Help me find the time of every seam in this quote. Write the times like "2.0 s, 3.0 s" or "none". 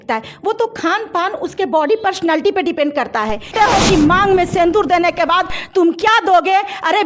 3.5 s